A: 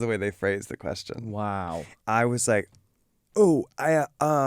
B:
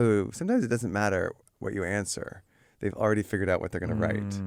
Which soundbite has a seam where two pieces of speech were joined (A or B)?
A